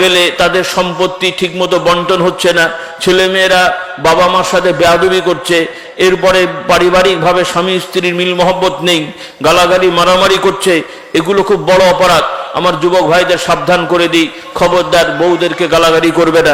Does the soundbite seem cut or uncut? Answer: uncut